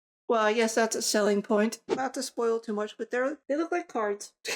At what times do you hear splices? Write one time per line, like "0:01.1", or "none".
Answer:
0:01.9
0:03.4